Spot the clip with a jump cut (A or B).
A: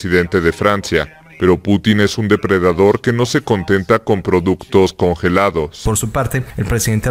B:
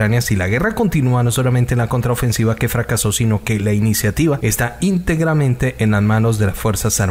A